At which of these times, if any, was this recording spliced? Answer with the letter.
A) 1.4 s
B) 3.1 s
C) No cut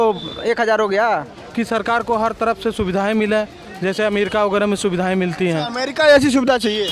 A